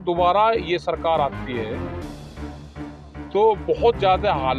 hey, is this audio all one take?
no; 2 cuts; at 1.8 s, 3.2 s

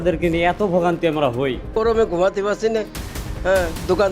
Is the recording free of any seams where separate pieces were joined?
no; 1 cut; at 1.7 s

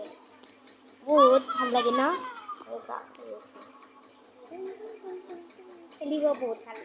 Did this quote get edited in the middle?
no; 0 cuts

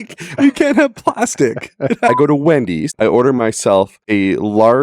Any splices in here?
yes; 3 cuts; at 2.1 s, 2.9 s, 4.0 s

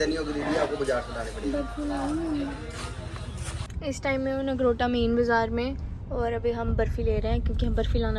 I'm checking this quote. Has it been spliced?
no; 0 cuts

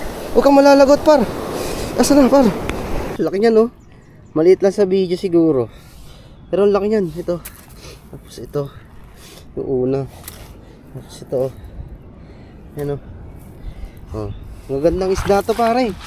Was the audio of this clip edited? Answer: yes; 1 cut; at 3.1 s

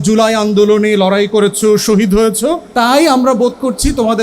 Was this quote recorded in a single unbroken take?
no; 1 cut; at 2.6 s

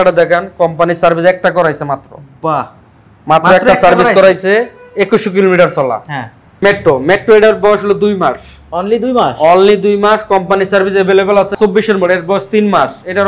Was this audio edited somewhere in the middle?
yes; 2 cuts; at 6.6 s, 11.5 s

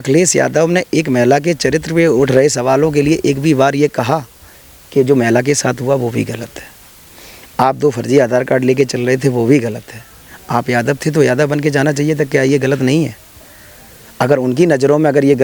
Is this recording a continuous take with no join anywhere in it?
yes; 0 cuts

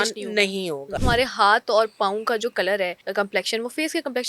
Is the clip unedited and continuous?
no; 2 cuts; at 1.0 s, 3.0 s

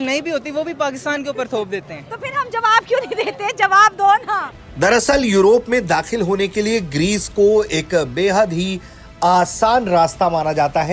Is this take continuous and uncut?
no; 1 cut; at 4.7 s

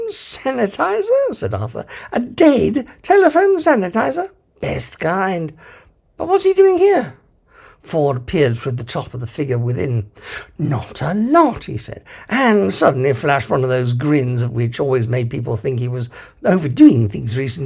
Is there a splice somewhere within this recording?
yes; 1 cut; at 9.2 s

